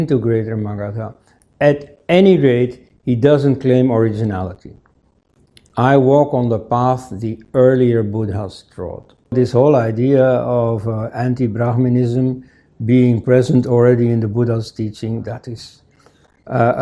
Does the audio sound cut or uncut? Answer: cut